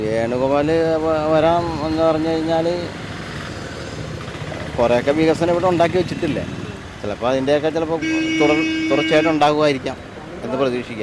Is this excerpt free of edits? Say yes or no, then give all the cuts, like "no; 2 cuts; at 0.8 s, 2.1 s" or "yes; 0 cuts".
yes; 0 cuts